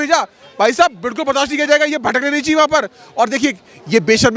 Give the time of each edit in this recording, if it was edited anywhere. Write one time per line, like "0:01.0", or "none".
none